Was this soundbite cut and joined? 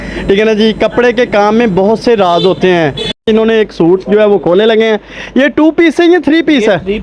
yes; 1 cut; at 3.1 s

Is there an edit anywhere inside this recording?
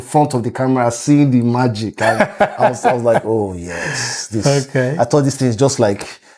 no; 0 cuts

